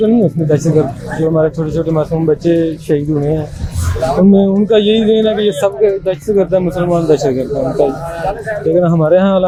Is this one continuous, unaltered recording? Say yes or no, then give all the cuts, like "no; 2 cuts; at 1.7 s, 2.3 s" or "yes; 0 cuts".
yes; 0 cuts